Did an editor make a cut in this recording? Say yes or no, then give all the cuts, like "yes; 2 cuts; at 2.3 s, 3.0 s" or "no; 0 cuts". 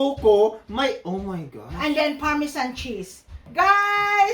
yes; 1 cut; at 3.4 s